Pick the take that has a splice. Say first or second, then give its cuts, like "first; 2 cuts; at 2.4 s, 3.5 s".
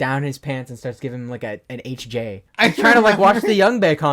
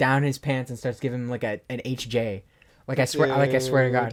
first; 1 cut; at 2.5 s